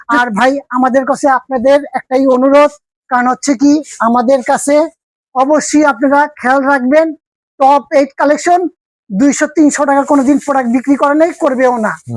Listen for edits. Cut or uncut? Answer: uncut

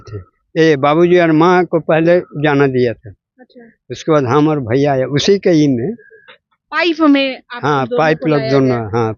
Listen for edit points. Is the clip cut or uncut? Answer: uncut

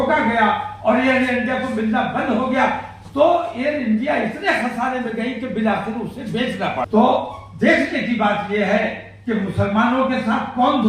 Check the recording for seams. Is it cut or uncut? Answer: cut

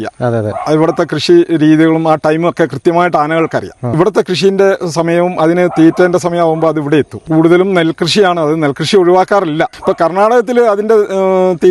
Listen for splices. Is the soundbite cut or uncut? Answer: cut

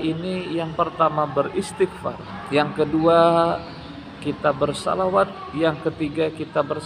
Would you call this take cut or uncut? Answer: cut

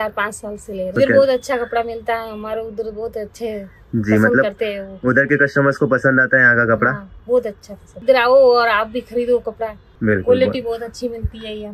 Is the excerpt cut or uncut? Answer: cut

